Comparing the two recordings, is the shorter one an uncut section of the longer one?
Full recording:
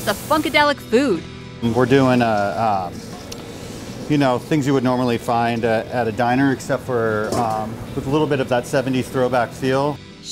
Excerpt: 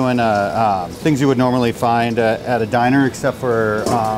no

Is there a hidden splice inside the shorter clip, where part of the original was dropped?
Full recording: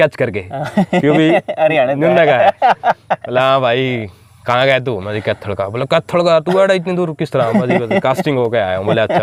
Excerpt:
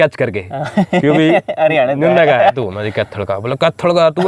yes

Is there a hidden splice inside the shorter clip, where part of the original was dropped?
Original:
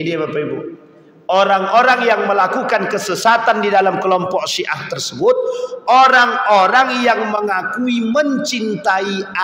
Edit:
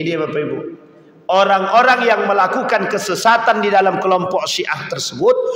no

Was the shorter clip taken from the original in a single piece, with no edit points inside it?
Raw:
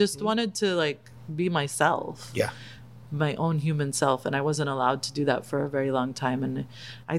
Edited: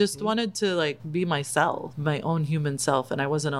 no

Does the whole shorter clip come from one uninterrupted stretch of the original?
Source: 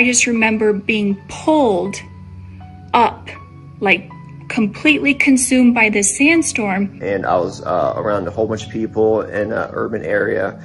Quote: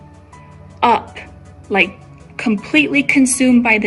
yes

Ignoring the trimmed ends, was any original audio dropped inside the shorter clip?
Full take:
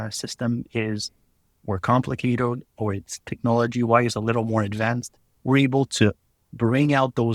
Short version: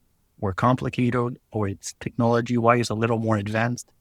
no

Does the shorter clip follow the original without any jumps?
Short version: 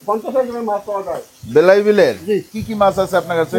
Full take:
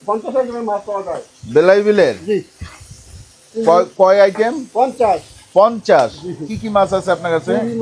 no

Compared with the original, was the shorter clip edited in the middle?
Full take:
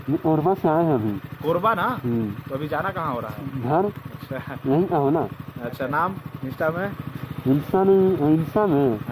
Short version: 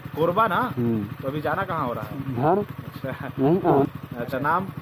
yes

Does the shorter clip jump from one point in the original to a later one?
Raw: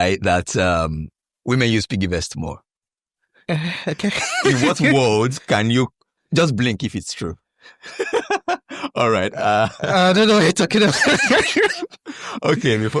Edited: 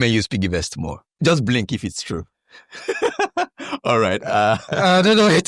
yes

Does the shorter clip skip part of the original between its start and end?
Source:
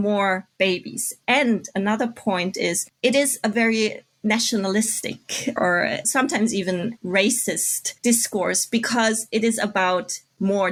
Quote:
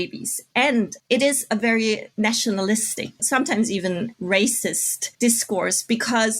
yes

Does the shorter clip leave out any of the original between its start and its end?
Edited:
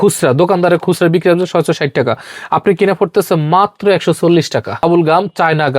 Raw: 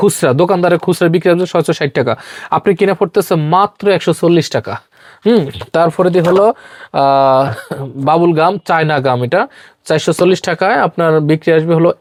yes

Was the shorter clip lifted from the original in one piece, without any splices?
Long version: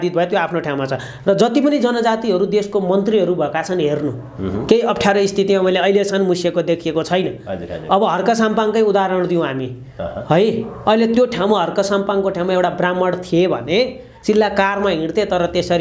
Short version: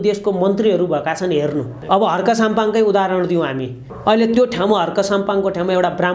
no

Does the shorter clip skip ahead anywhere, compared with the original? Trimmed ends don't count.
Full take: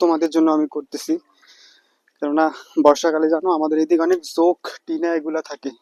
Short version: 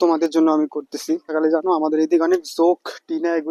yes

